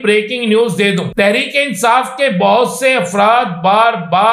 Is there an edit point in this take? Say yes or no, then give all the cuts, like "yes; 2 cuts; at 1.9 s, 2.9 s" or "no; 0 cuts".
yes; 1 cut; at 1.1 s